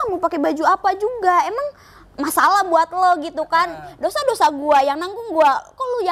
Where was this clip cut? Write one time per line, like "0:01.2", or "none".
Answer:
none

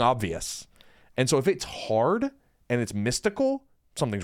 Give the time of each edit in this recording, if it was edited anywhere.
none

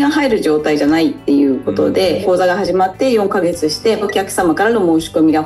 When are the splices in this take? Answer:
0:02.1

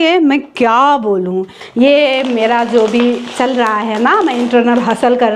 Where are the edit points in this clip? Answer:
0:01.6

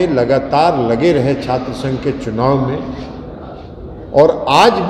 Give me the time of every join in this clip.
none

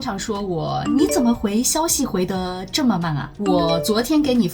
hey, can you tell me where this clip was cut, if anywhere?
0:03.4

